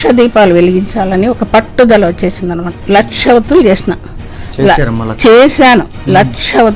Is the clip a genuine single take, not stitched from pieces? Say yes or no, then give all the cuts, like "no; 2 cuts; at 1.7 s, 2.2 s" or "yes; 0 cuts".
no; 1 cut; at 2.8 s